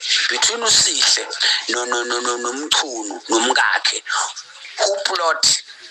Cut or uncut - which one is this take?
uncut